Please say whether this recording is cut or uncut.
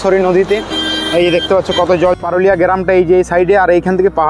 cut